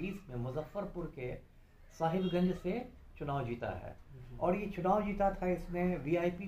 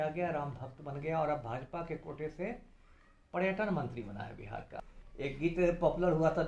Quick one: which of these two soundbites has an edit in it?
second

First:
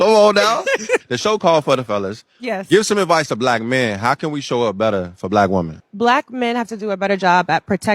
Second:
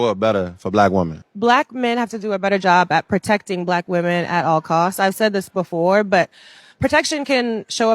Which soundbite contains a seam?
second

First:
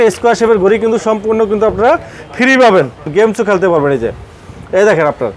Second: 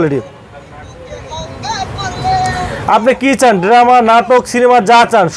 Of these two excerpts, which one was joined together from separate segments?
first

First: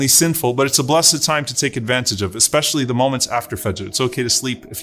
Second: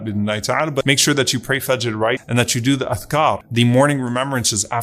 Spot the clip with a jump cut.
second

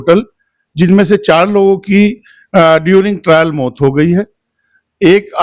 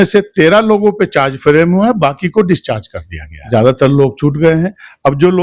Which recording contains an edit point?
second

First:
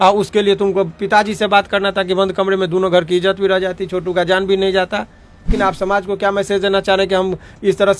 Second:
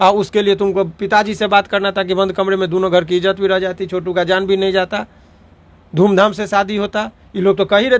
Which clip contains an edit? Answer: first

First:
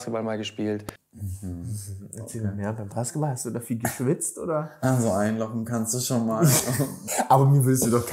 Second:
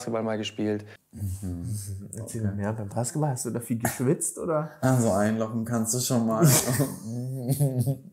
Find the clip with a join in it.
first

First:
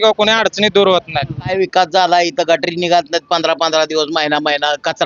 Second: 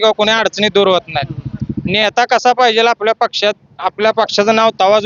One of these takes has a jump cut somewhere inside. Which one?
first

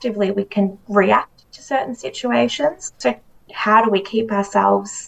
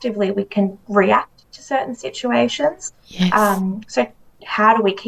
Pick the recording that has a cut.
first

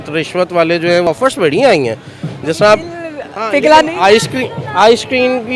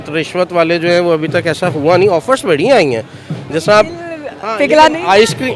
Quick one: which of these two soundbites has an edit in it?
first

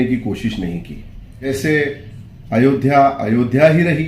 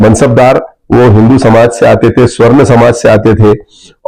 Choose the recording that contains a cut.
first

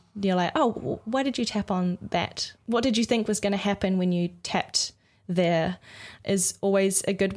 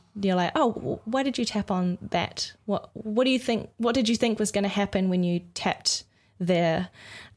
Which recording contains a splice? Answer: first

